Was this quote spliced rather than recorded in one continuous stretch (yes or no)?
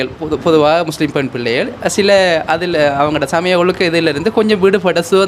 no